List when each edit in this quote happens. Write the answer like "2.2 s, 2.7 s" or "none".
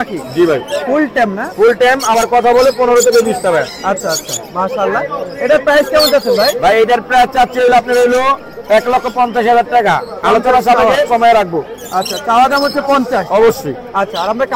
none